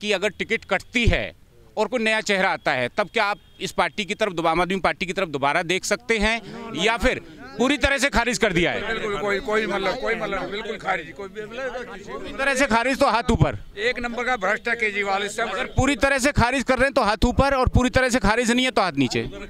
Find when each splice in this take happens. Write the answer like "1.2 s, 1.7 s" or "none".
none